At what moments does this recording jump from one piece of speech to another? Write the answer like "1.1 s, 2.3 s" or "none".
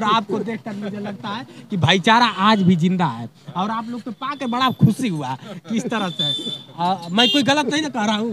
none